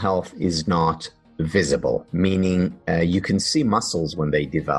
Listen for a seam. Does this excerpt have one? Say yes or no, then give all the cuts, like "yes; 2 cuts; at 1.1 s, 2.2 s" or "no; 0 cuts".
no; 0 cuts